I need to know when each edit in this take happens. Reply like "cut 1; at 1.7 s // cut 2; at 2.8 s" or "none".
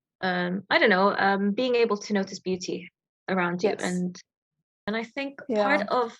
cut 1; at 4.8 s